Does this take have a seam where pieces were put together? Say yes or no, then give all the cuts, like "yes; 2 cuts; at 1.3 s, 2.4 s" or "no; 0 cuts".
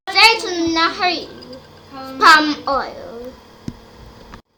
no; 0 cuts